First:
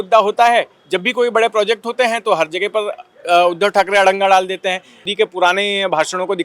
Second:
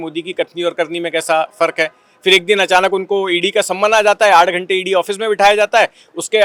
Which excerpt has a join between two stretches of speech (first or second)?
first